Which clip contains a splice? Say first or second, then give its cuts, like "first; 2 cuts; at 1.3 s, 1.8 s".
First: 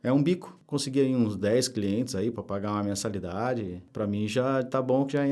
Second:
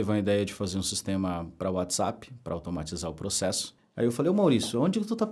second; 1 cut; at 3.7 s